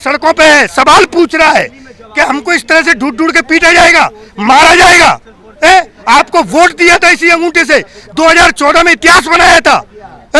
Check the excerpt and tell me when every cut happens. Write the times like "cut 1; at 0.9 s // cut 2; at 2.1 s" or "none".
none